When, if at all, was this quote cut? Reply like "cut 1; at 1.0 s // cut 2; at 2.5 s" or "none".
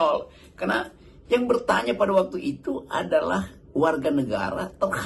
none